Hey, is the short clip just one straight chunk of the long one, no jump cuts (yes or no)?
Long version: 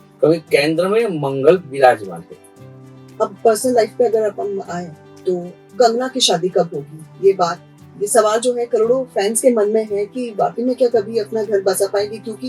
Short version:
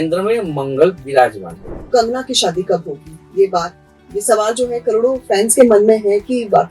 no